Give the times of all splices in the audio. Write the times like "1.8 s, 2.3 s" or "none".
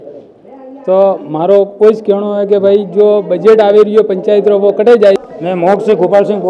5.2 s